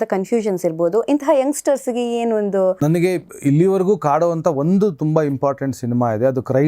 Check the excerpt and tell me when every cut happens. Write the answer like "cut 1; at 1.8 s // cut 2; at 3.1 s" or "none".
cut 1; at 2.8 s